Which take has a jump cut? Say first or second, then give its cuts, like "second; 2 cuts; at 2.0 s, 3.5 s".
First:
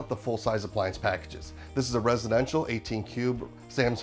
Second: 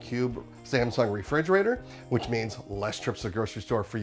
second; 1 cut; at 1.9 s